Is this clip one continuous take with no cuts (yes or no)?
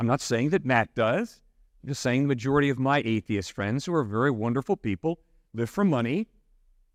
yes